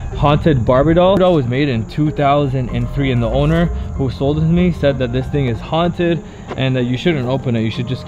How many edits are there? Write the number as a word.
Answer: one